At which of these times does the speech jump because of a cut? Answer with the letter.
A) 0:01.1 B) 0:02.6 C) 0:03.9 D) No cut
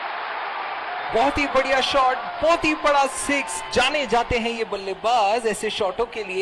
A